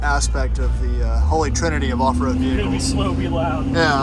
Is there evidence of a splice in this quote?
no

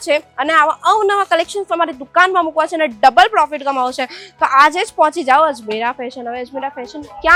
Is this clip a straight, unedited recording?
yes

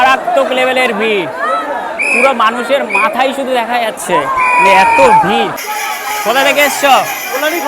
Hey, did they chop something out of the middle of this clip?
yes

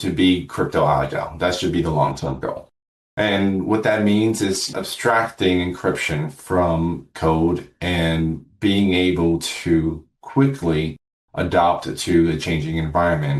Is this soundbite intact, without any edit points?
no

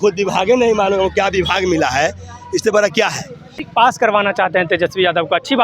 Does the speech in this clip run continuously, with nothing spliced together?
no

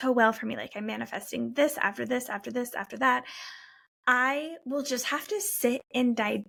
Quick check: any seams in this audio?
no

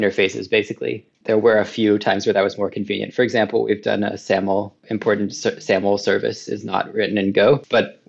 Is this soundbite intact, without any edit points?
no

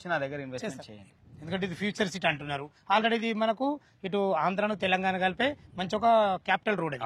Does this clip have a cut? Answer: yes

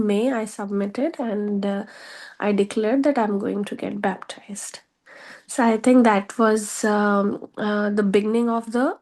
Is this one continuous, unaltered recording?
yes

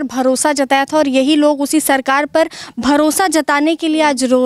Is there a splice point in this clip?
no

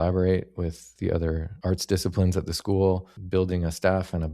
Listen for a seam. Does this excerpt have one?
yes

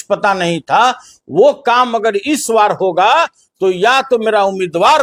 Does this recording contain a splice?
no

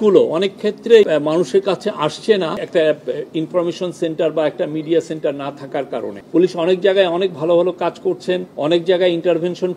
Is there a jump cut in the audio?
yes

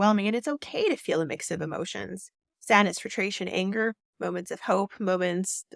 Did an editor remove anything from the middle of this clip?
no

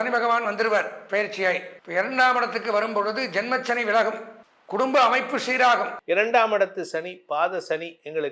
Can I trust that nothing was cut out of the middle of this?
no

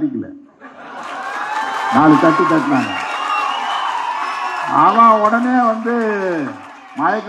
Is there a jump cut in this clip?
no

